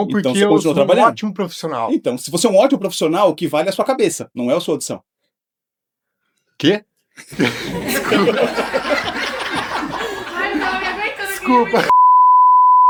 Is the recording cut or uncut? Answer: uncut